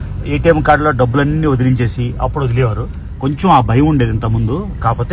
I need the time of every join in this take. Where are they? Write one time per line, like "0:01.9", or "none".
none